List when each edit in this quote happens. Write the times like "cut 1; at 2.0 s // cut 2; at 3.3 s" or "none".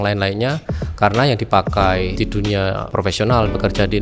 cut 1; at 2.4 s